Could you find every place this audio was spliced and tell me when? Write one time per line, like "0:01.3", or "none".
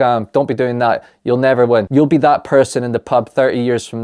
0:01.9